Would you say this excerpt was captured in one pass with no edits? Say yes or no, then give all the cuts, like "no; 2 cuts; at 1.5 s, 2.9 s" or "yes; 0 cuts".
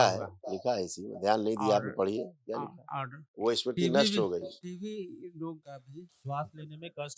no; 2 cuts; at 4.6 s, 5.8 s